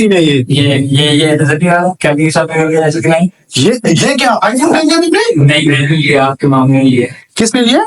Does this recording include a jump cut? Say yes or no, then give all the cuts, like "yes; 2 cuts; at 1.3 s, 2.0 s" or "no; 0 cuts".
no; 0 cuts